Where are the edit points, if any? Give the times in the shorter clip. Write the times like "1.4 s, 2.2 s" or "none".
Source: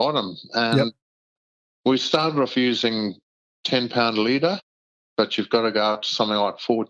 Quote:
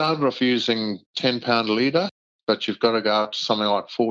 1.0 s, 2.2 s